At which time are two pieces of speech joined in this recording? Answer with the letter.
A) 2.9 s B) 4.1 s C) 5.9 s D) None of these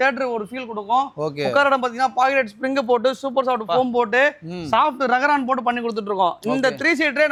D